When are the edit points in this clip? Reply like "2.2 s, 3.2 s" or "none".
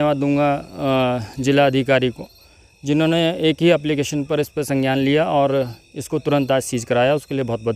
none